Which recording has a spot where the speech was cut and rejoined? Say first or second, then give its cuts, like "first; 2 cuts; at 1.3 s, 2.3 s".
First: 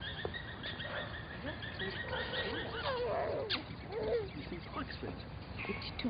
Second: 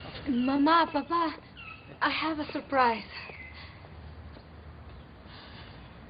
first; 1 cut; at 3.6 s